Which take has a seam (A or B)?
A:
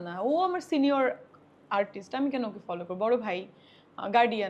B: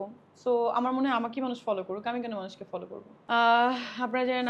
B